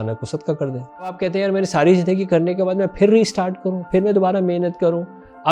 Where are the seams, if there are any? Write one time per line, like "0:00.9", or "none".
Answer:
0:01.2